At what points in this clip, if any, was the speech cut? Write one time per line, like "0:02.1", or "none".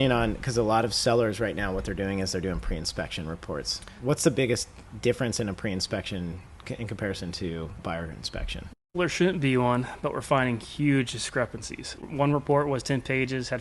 0:12.0